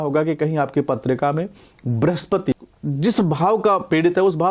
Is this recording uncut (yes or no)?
no